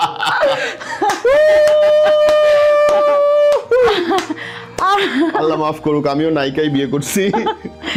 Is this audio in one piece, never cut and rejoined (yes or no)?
yes